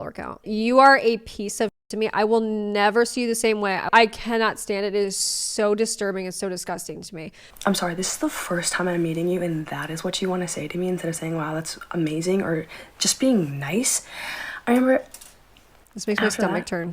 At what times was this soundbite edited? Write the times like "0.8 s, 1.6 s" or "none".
none